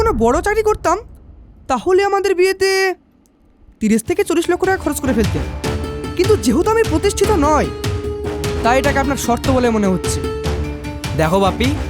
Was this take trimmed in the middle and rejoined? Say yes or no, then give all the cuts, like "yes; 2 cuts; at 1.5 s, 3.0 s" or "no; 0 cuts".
no; 0 cuts